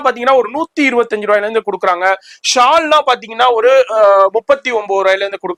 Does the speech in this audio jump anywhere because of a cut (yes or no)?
no